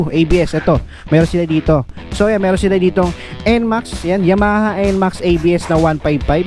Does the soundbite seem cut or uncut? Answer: cut